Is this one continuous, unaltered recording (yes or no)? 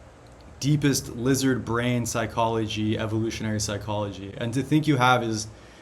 yes